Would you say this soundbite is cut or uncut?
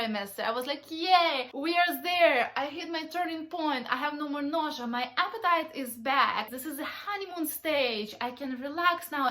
cut